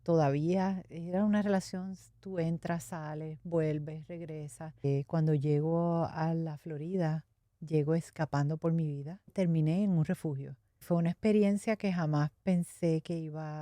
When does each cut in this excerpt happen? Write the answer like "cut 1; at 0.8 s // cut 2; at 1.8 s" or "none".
cut 1; at 4.9 s // cut 2; at 9.3 s // cut 3; at 10.8 s